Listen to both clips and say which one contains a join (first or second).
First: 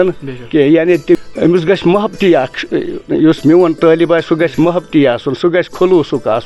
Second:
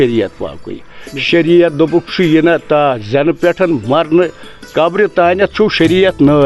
first